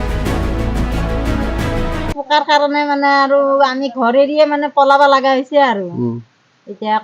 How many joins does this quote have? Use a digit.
1